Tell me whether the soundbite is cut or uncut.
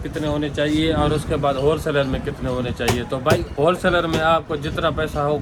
uncut